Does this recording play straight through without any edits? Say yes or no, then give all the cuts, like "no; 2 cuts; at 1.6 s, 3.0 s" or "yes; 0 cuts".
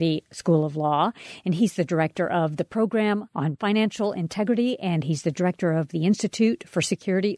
yes; 0 cuts